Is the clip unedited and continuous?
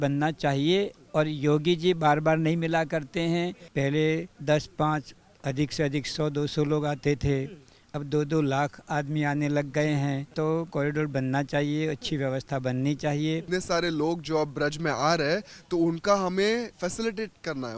no; 4 cuts; at 3.6 s, 4.3 s, 10.6 s, 13.4 s

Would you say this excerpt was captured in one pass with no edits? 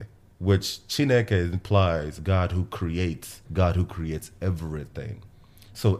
no; 2 cuts; at 2.2 s, 3.4 s

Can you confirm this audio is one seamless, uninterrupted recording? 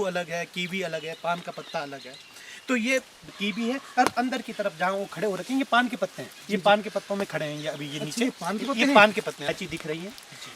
no; 2 cuts; at 3.3 s, 9.5 s

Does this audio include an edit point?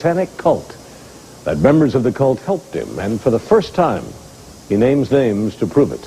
yes; 1 cut; at 4.9 s

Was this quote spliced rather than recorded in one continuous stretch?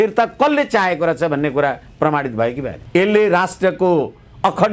yes; 1 cut; at 2.7 s

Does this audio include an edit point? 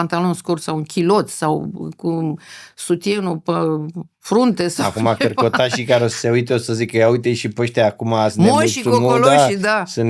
no; 0 cuts

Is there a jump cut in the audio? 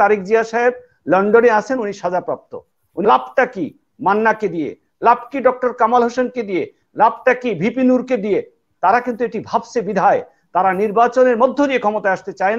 yes; 1 cut; at 3.0 s

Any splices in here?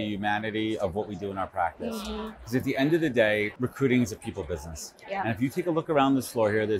yes; 1 cut; at 3.5 s

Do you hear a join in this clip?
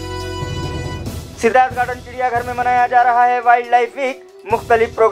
yes; 1 cut; at 1.2 s

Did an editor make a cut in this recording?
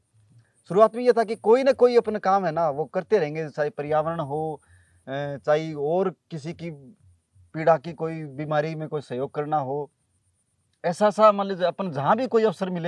no; 0 cuts

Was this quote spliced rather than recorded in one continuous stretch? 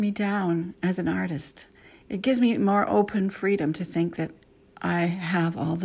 no; 0 cuts

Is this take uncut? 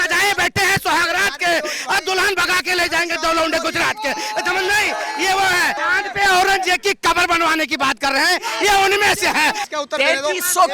no; 2 cuts; at 5.8 s, 9.7 s

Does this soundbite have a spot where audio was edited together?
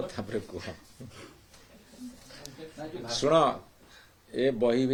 no; 0 cuts

